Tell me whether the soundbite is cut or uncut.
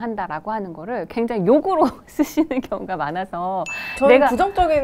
uncut